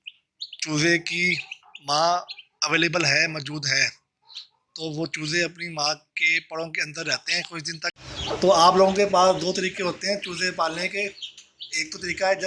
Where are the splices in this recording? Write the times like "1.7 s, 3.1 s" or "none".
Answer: 8.0 s